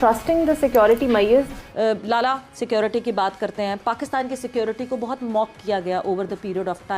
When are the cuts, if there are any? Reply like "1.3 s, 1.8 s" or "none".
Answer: 1.6 s